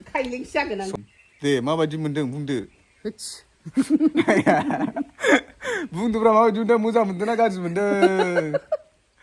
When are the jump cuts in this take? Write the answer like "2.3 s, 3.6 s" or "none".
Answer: 0.9 s